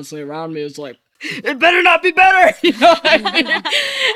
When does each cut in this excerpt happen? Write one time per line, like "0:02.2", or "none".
0:01.1